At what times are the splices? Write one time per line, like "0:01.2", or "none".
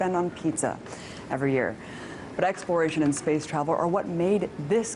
none